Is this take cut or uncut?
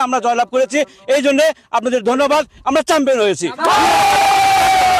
uncut